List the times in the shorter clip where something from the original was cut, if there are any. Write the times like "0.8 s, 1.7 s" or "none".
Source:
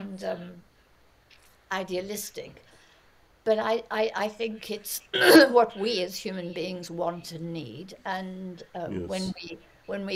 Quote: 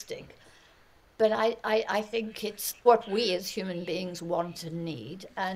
2.8 s